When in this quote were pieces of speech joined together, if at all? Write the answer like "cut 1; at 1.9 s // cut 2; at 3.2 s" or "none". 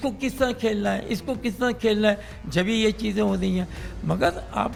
none